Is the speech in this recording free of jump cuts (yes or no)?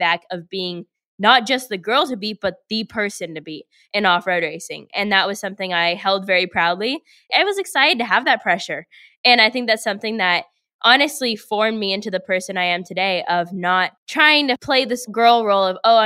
no